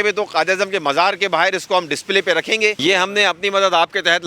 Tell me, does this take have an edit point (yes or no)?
yes